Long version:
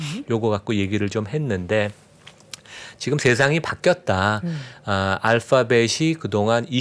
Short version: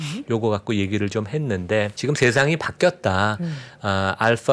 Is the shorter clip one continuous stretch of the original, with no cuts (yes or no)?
no